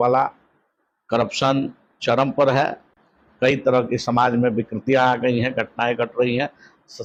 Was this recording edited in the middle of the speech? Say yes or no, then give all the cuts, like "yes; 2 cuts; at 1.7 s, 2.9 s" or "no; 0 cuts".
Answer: no; 0 cuts